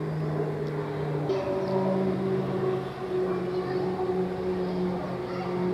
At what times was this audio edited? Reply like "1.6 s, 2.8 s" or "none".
1.3 s